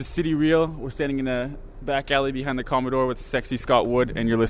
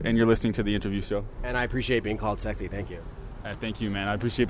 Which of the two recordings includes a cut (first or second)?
second